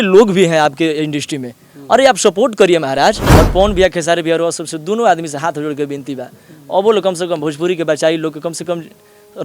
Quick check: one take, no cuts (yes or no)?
no